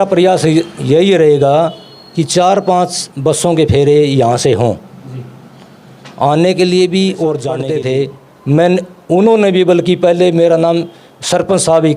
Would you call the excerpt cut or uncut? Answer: cut